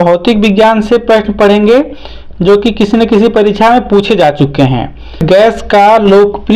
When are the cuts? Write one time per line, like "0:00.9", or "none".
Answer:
0:05.2

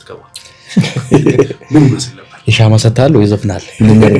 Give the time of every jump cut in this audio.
none

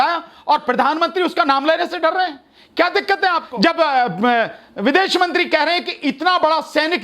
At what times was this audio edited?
0:03.5

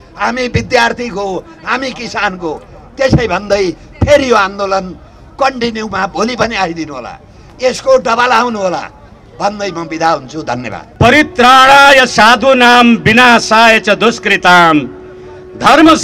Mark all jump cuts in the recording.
none

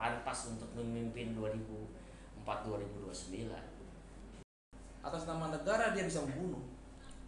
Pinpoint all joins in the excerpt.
0:04.5

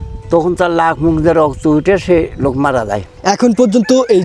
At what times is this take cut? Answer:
0:03.1

